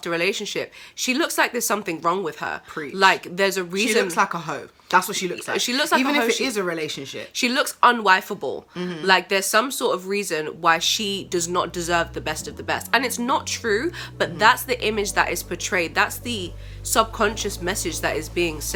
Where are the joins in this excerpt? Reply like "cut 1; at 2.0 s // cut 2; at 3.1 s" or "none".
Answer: none